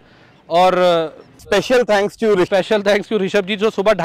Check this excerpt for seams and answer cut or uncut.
uncut